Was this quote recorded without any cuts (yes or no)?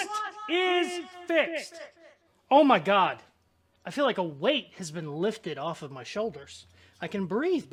yes